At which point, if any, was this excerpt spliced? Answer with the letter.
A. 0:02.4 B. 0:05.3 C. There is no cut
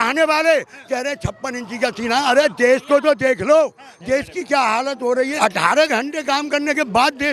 B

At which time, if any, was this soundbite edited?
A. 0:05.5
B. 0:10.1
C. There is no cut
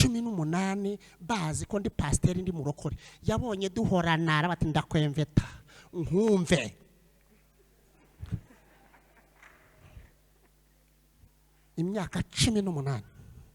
C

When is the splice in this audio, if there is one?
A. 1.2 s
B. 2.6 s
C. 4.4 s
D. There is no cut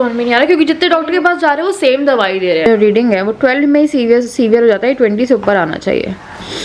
B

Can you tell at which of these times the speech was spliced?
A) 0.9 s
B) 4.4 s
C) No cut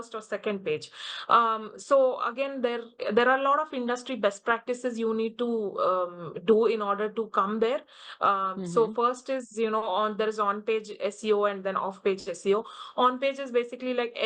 C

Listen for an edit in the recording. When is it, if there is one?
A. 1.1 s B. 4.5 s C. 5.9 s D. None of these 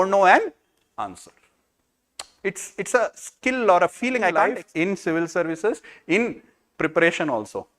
B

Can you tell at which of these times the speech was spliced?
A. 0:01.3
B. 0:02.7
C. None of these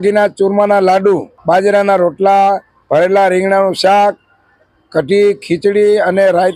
A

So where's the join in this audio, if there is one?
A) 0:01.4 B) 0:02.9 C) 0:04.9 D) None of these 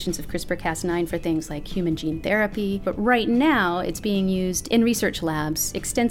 B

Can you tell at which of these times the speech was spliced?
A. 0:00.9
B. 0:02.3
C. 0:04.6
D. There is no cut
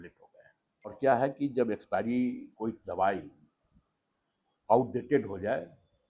A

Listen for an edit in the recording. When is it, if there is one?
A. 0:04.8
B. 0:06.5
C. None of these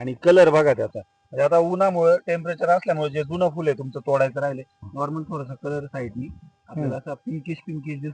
A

